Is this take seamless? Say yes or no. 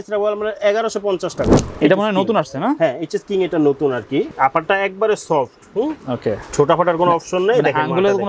no